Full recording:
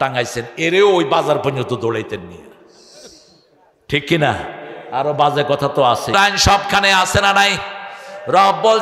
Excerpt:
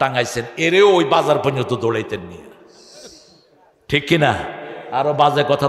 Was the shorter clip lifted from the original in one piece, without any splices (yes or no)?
yes